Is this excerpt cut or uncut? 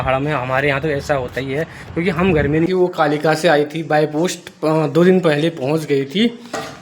cut